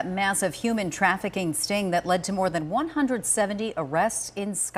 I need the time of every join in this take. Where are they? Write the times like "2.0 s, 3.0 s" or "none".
none